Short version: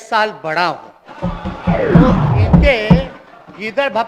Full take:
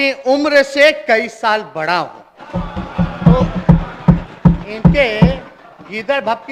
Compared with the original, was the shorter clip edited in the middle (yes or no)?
yes